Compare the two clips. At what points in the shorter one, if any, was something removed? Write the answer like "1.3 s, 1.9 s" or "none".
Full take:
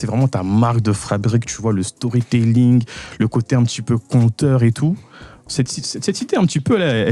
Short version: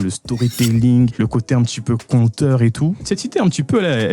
1.1 s, 3.0 s